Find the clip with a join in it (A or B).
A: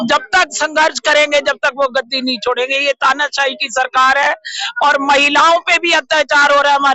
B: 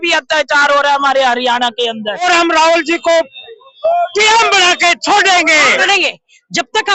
B